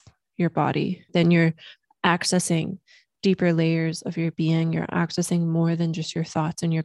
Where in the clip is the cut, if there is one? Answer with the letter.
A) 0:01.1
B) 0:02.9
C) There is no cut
A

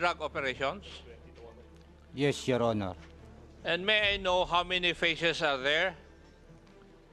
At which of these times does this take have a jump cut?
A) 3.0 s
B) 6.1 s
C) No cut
B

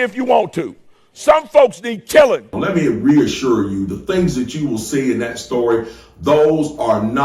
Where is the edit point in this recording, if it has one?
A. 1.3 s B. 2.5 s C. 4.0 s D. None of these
B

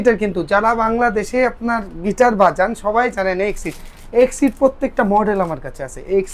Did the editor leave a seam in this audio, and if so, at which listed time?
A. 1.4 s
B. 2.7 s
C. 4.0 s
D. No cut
D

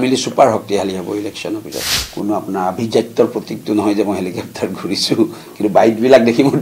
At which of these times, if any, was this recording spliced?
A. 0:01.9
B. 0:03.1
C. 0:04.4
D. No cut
A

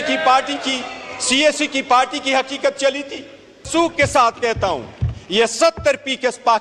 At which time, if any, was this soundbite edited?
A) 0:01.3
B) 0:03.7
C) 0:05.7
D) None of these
B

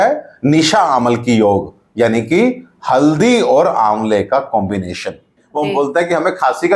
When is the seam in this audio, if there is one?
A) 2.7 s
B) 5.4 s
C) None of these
B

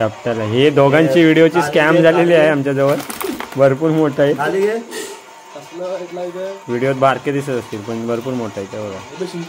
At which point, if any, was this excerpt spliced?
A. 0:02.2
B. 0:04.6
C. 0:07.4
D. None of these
D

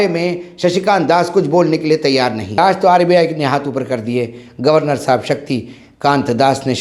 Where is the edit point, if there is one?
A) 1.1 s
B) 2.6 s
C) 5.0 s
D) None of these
B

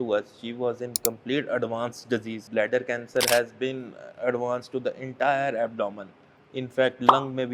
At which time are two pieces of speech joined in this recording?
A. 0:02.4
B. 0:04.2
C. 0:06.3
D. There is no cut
A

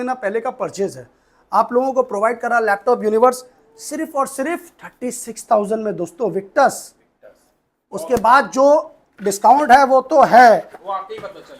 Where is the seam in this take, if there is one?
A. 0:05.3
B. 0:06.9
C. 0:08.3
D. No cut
D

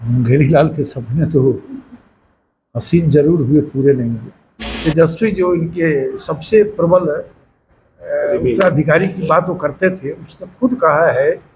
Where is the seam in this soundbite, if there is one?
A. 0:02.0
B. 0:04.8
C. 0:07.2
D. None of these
B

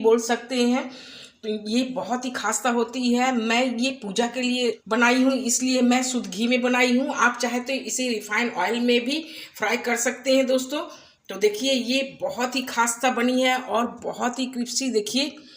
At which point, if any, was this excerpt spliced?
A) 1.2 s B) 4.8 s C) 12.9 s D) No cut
B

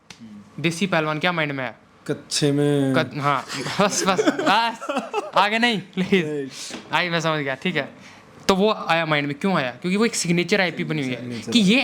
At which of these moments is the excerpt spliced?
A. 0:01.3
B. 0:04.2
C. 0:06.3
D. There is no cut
D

